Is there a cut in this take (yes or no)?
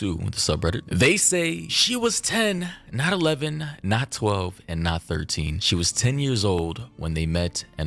no